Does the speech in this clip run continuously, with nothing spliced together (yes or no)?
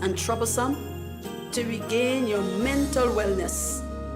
no